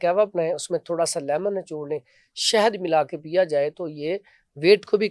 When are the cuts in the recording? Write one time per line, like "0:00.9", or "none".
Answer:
none